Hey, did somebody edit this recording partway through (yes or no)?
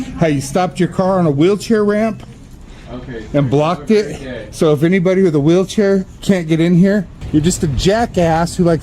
yes